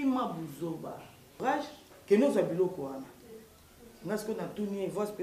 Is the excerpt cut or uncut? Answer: cut